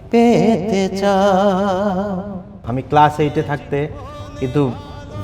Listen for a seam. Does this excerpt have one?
yes; 1 cut; at 2.7 s

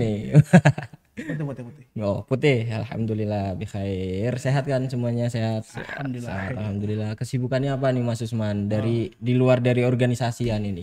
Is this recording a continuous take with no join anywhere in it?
yes; 0 cuts

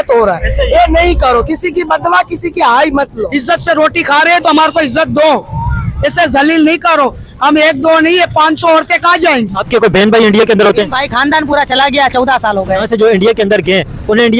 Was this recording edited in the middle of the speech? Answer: yes; 3 cuts; at 3.2 s, 9.6 s, 12.8 s

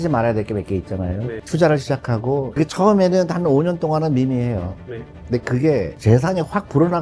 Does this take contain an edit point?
no; 0 cuts

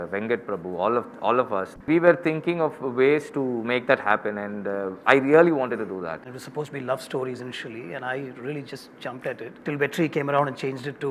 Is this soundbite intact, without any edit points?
no; 3 cuts; at 1.8 s, 6.4 s, 9.6 s

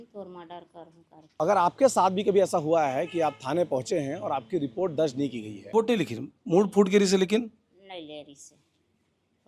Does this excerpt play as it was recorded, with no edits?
no; 2 cuts; at 1.3 s, 5.7 s

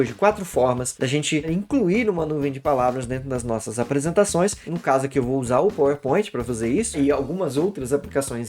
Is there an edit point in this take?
yes; 3 cuts; at 1.5 s, 4.6 s, 7.0 s

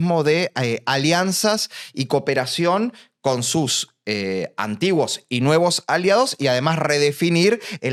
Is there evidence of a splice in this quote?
no; 0 cuts

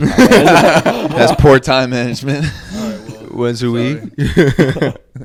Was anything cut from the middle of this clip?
no; 0 cuts

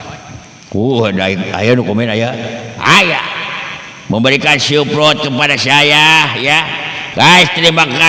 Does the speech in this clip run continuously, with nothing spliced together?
no; 1 cut; at 6.9 s

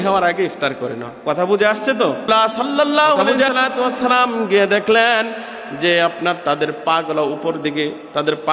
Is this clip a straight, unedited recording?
no; 1 cut; at 2.3 s

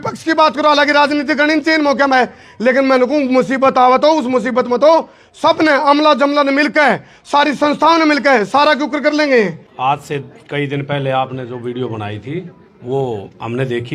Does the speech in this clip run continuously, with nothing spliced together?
no; 1 cut; at 9.6 s

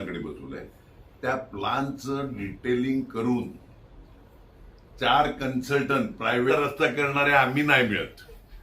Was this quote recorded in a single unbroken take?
no; 1 cut; at 6.5 s

